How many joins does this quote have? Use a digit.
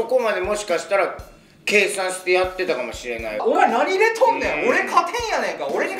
1